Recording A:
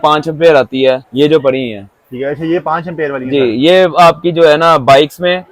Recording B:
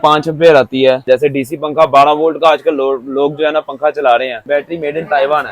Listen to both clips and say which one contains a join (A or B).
B